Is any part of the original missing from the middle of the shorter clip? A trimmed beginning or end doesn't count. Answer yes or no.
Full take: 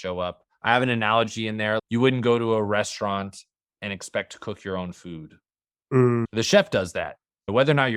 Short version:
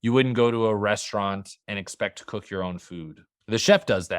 yes